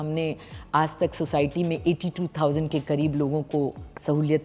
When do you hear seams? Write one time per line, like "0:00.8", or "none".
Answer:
none